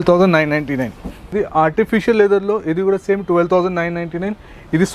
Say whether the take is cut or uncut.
cut